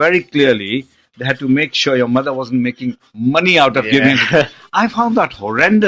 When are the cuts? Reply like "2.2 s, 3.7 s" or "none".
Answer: none

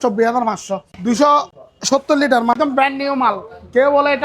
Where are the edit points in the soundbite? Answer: 0.9 s, 2.5 s

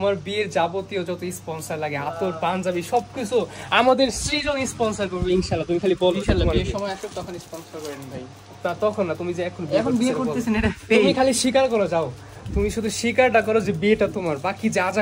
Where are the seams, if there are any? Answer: none

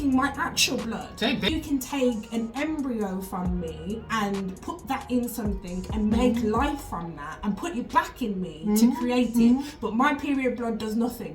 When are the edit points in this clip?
1.5 s

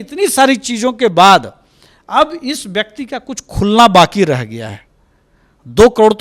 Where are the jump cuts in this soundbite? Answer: none

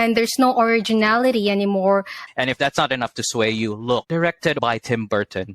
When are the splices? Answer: 2.2 s, 4.6 s

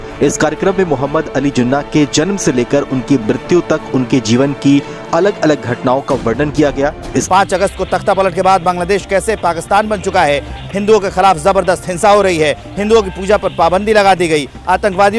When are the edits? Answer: 7.2 s, 10.6 s

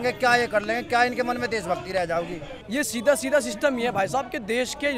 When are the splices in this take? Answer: 2.5 s

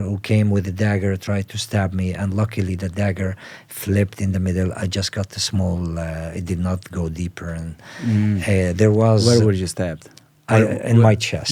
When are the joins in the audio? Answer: none

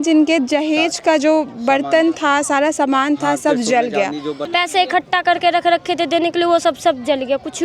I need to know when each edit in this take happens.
4.4 s

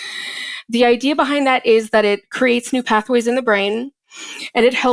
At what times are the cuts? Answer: none

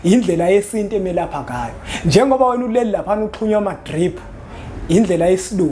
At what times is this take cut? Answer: none

